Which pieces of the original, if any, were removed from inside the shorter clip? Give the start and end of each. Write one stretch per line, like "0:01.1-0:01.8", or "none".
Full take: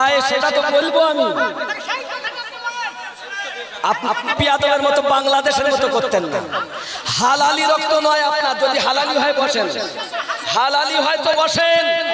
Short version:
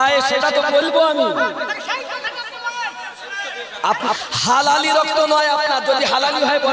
0:04.2-0:07.0